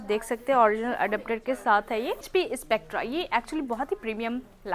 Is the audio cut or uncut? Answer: cut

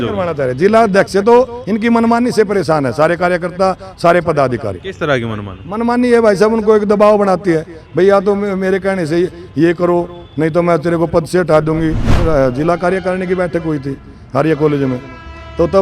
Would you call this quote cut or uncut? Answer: cut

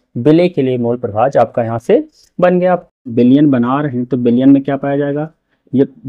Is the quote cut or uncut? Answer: cut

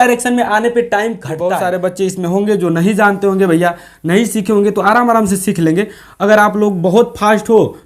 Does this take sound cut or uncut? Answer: cut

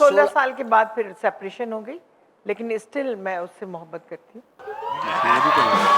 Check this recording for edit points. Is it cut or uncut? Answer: uncut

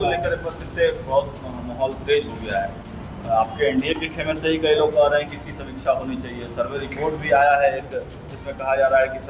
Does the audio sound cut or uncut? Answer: uncut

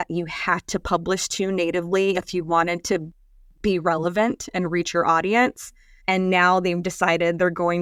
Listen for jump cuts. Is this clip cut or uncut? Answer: uncut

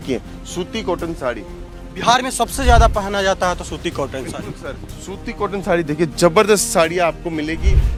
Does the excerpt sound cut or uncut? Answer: uncut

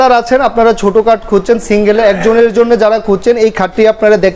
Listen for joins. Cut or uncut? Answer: uncut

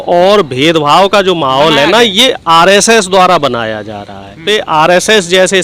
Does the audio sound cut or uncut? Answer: cut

